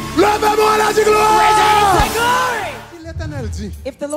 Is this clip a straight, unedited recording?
no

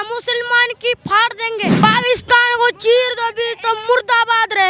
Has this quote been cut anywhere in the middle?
yes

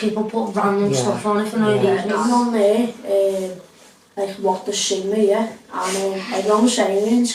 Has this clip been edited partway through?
yes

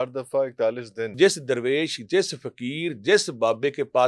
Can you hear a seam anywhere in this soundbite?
yes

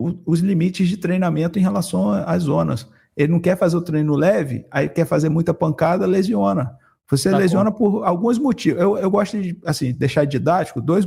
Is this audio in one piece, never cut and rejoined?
yes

